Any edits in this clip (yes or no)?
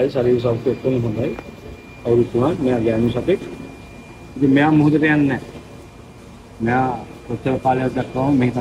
no